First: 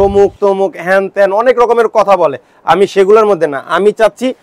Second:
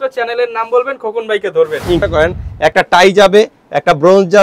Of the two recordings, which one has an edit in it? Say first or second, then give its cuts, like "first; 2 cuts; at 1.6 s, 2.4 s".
second; 1 cut; at 2.0 s